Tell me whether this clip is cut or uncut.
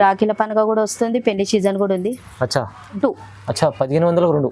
cut